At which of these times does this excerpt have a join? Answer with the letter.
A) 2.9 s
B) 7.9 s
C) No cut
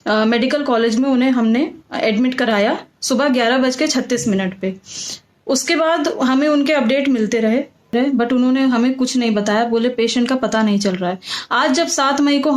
B